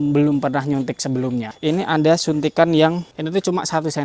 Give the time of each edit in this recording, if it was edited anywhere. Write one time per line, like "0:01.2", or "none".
0:01.5
0:03.1